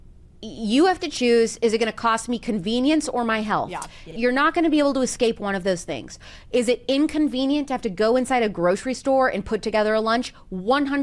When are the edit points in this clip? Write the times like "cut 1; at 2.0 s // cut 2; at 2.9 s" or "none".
cut 1; at 4.0 s